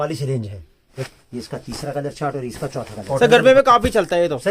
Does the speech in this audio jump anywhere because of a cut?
yes; 2 cuts; at 1.0 s, 3.1 s

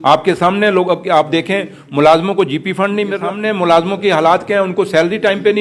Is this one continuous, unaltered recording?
no; 1 cut; at 3.4 s

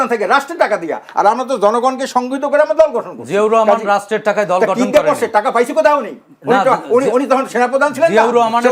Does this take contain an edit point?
no; 0 cuts

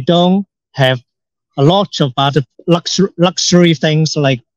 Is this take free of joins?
no; 1 cut; at 2.5 s

